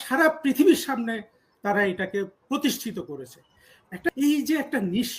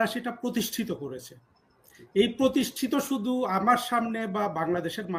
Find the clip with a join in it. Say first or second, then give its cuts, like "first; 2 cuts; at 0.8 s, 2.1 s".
first; 1 cut; at 4.1 s